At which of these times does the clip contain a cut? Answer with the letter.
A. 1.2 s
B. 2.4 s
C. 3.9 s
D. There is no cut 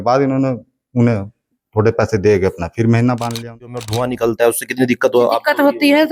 C